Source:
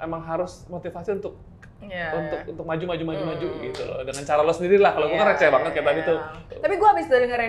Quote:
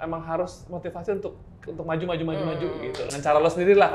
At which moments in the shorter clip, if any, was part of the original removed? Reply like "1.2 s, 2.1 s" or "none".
1.7 s, 3.1 s

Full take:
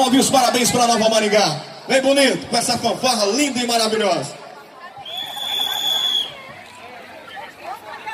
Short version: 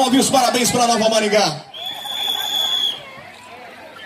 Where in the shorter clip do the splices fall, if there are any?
1.7 s

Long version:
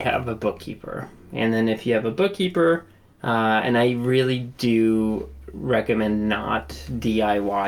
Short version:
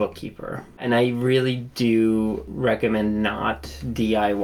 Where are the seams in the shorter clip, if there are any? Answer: 0.8 s, 2.5 s

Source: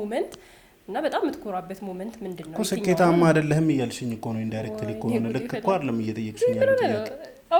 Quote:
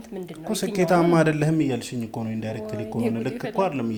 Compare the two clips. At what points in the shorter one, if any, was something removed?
none

